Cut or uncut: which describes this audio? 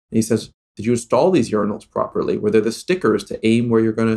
uncut